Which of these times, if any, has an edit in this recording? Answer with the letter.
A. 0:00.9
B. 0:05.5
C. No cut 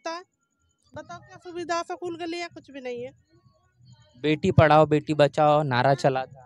C